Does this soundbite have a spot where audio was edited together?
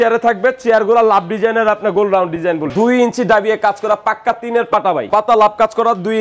yes; 2 cuts; at 2.7 s, 5.1 s

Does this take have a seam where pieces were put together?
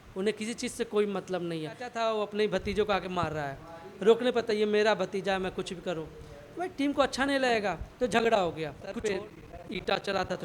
yes; 2 cuts; at 1.9 s, 8.8 s

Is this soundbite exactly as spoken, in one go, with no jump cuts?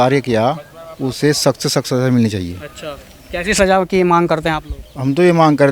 yes; 0 cuts

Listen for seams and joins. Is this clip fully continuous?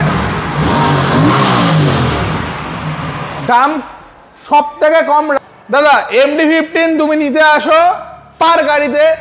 no; 1 cut; at 5.4 s

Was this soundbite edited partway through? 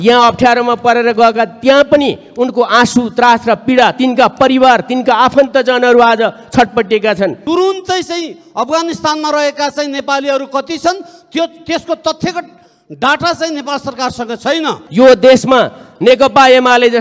yes; 2 cuts; at 7.4 s, 14.8 s

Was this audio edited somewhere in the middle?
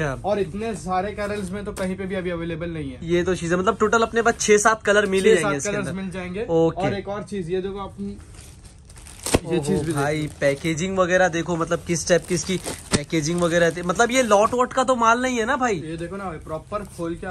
no; 0 cuts

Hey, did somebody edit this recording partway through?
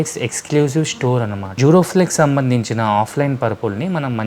yes; 1 cut; at 1.4 s

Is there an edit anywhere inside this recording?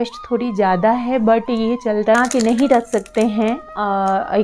yes; 1 cut; at 2.2 s

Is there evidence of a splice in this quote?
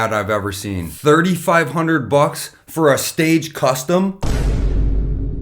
yes; 2 cuts; at 0.9 s, 4.2 s

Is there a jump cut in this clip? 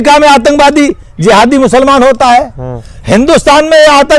no; 0 cuts

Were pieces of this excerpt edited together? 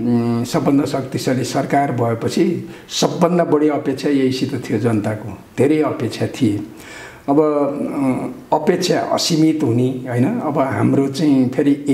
no; 0 cuts

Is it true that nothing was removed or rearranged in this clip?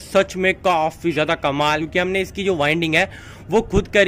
no; 1 cut; at 1.8 s

